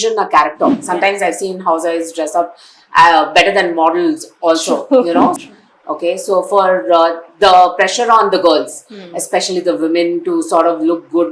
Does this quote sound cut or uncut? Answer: cut